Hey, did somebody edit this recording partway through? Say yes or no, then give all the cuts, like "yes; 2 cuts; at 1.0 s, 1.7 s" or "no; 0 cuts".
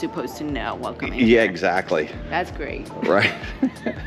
yes; 1 cut; at 2.2 s